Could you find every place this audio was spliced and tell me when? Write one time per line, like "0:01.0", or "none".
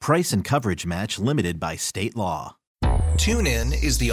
0:02.6